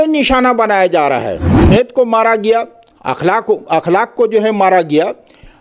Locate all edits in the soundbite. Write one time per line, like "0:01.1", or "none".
0:01.6